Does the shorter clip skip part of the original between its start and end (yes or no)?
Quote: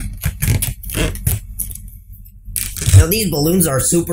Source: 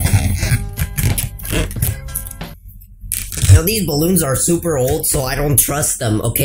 no